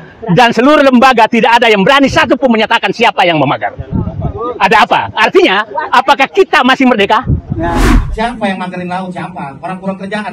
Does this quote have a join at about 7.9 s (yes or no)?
yes